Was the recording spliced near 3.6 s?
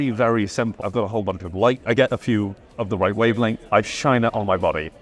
yes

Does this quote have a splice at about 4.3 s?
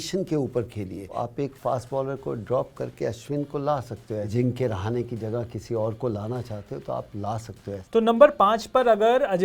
yes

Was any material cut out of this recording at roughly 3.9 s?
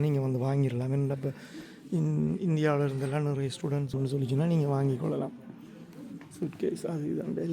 yes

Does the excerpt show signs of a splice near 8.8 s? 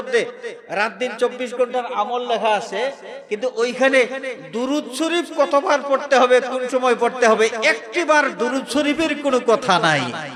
no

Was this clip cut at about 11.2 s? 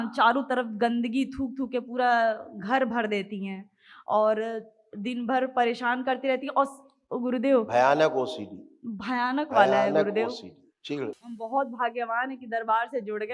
yes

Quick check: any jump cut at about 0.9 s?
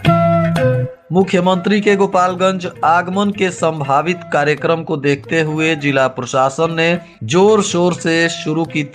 yes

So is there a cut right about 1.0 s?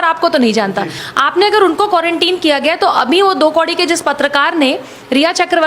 yes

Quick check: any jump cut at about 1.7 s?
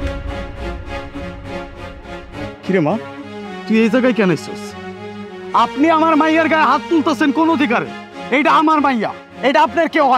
no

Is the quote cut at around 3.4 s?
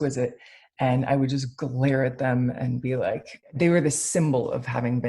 yes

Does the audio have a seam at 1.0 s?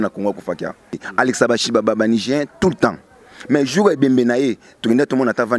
yes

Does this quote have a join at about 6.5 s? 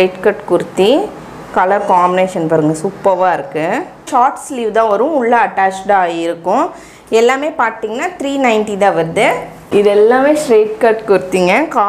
no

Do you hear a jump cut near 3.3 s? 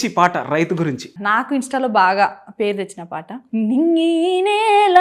yes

